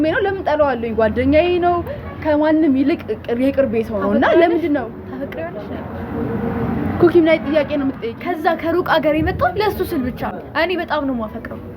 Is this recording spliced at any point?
yes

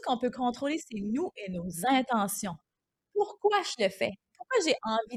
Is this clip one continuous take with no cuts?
yes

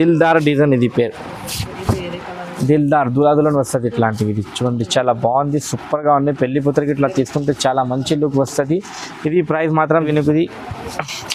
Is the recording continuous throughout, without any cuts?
no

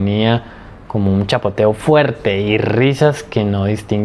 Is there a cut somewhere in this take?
no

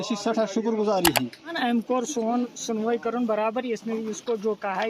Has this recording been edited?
yes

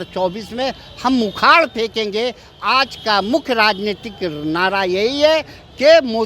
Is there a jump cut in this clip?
no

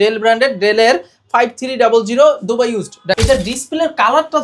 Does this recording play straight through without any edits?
no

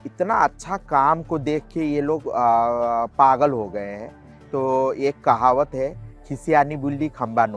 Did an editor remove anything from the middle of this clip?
no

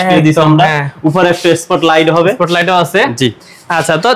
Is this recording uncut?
yes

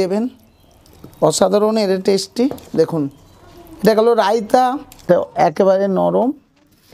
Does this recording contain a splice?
yes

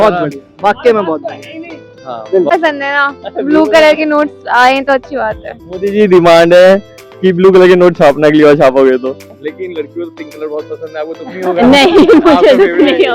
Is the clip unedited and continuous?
no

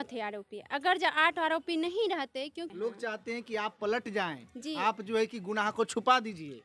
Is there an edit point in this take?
yes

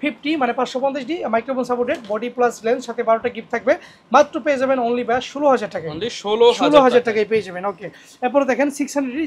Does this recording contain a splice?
no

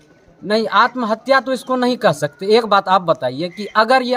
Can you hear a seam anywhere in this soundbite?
no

